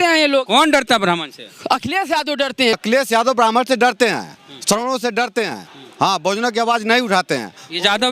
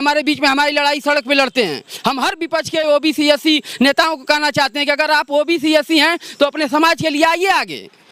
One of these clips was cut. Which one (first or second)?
first